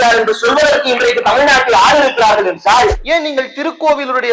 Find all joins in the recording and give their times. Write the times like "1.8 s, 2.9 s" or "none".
3.0 s